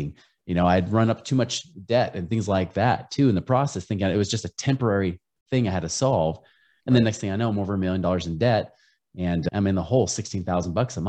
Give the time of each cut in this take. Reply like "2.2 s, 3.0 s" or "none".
9.5 s